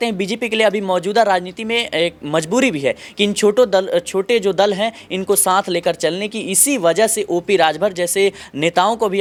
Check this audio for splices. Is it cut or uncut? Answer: uncut